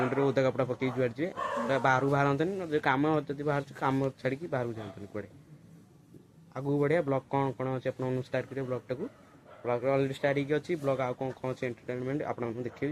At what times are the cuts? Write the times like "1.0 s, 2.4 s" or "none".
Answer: none